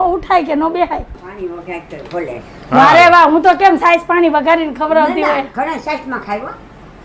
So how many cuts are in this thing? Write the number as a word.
one